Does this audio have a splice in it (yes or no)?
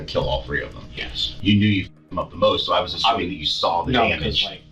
yes